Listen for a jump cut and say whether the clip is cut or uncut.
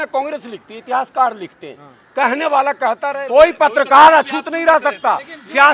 cut